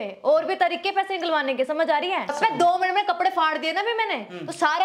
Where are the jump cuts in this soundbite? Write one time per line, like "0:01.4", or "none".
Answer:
0:02.3